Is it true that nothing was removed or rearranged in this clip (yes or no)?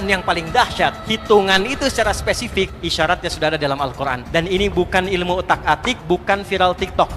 no